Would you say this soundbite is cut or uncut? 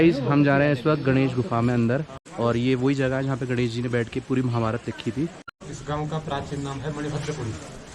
cut